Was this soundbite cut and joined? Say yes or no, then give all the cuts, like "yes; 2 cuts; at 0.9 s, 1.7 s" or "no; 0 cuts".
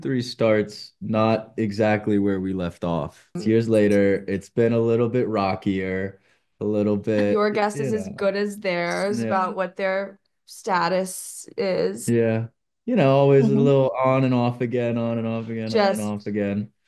yes; 1 cut; at 3.3 s